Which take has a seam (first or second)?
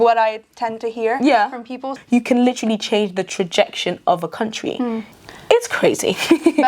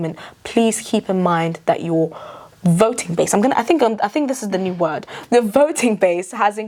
first